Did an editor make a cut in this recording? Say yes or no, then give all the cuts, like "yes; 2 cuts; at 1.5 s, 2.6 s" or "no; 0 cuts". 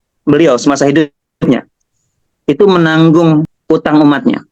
yes; 1 cut; at 3.6 s